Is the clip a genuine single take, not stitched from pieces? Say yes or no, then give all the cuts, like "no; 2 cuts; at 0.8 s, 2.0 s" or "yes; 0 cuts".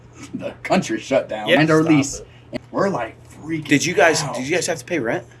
no; 2 cuts; at 1.6 s, 2.5 s